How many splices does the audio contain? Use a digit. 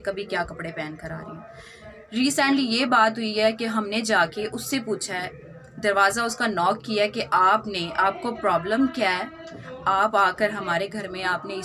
0